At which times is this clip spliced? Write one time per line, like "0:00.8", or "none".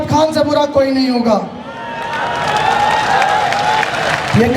none